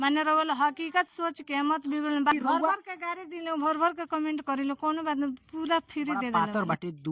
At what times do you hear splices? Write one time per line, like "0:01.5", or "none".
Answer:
0:02.3
0:06.3